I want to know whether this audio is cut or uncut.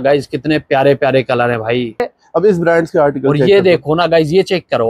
cut